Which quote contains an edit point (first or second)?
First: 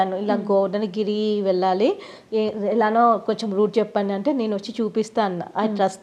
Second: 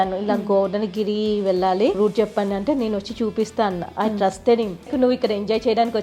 second